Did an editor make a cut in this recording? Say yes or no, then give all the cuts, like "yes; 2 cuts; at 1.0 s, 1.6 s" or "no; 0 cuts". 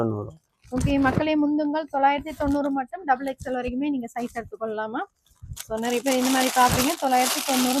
no; 0 cuts